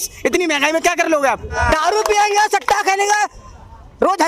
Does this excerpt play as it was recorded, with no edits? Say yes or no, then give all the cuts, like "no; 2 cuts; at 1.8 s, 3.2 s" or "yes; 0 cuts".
no; 1 cut; at 1.6 s